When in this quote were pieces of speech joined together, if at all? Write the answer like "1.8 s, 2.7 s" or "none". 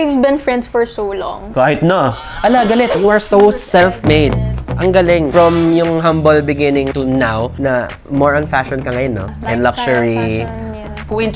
2.9 s